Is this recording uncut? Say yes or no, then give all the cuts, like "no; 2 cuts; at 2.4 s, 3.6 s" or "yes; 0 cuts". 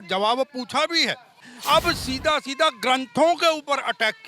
no; 1 cut; at 1.5 s